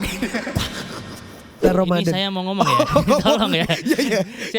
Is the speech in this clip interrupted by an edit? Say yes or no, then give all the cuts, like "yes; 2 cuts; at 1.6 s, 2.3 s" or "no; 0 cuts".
yes; 1 cut; at 1.7 s